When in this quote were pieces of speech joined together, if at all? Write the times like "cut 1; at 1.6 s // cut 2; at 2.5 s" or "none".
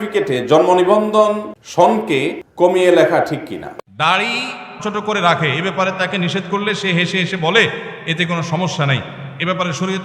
cut 1; at 1.6 s // cut 2; at 2.4 s // cut 3; at 3.8 s